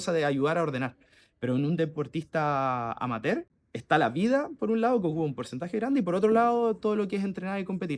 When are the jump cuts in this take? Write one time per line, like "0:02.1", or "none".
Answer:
0:03.5